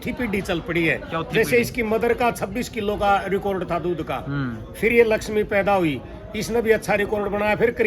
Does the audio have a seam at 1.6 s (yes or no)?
no